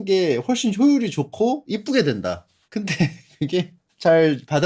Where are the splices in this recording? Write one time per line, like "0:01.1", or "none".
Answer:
none